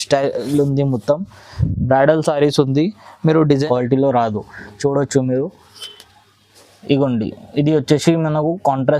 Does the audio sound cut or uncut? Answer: cut